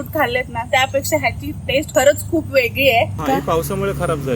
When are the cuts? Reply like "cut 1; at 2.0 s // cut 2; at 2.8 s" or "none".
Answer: cut 1; at 3.2 s